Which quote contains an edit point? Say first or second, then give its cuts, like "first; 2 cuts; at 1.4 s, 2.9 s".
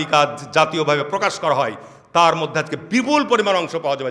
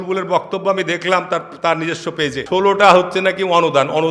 second; 1 cut; at 2.4 s